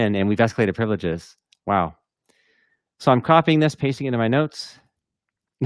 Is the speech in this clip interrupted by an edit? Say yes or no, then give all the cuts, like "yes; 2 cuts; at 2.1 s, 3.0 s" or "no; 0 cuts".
no; 0 cuts